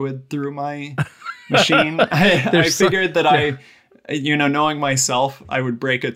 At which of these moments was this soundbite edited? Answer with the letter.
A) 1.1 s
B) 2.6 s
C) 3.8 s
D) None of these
D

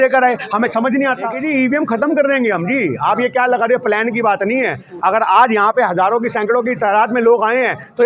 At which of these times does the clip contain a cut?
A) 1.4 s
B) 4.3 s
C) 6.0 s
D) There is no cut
A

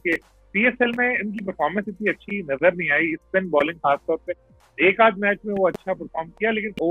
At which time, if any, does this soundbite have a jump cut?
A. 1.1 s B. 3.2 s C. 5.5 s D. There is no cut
D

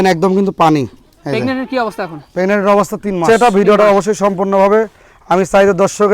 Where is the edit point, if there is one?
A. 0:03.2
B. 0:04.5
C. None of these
A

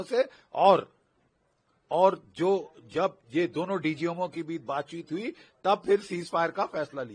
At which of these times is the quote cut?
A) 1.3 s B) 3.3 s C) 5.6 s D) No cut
D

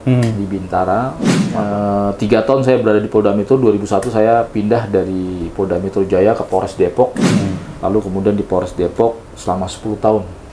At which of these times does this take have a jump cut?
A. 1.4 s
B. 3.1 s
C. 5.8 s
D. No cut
A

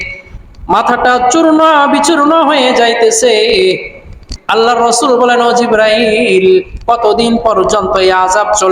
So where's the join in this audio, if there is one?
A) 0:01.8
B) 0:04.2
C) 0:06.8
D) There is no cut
B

